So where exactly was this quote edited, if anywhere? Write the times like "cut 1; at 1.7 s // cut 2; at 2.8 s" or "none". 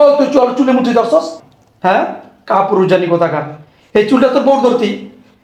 none

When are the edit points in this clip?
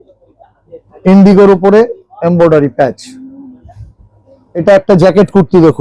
cut 1; at 1.0 s // cut 2; at 4.6 s

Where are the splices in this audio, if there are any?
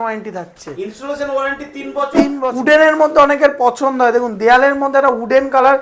cut 1; at 2.4 s

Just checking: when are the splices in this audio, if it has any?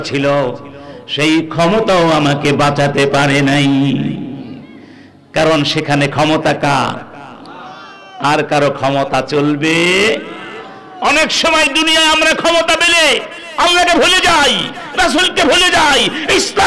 none

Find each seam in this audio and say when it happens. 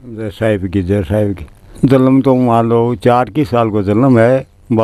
cut 1; at 1.5 s

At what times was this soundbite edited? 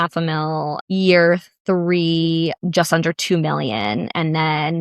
cut 1; at 0.8 s // cut 2; at 2.6 s

